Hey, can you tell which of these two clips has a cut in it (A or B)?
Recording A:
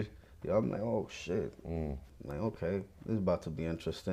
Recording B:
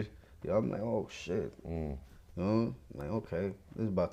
A